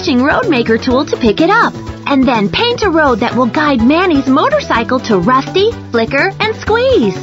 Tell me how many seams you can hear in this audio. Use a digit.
1